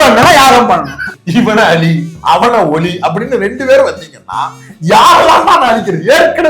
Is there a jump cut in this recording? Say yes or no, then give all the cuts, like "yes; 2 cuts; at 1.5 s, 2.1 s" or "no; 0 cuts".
yes; 1 cut; at 1.1 s